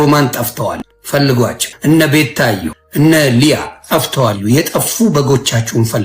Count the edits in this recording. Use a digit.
3